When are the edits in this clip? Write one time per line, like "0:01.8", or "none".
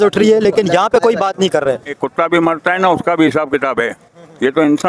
0:02.0